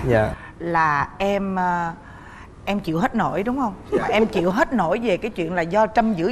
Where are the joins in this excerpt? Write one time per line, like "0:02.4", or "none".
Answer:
none